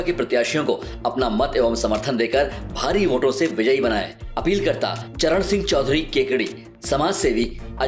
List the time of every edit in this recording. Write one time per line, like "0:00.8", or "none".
none